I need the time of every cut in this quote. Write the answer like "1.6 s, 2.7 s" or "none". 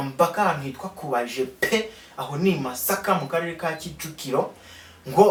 none